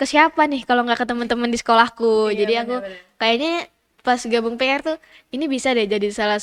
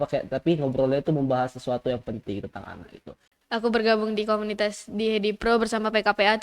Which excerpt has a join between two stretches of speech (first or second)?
second